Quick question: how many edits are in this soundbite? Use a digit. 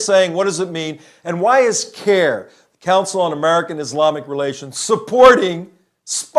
1